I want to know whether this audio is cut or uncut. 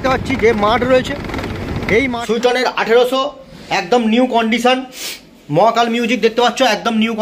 cut